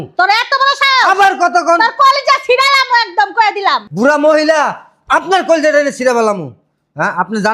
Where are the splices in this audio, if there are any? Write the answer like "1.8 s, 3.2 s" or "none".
3.9 s

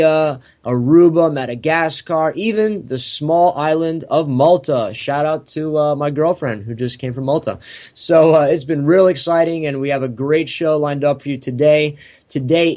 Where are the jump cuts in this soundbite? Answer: 4.5 s

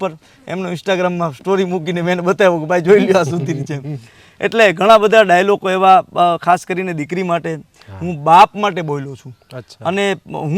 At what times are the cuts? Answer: none

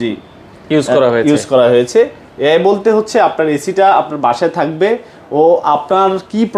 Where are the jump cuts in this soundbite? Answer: none

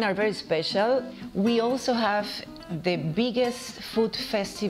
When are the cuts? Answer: 1.2 s

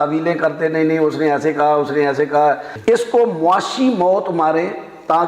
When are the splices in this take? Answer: 2.7 s

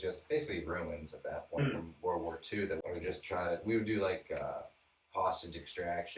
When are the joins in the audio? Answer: 2.8 s

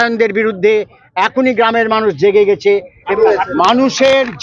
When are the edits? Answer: 3.0 s

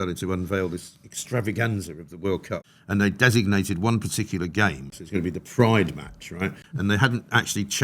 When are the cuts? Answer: 2.6 s, 5.0 s, 6.7 s

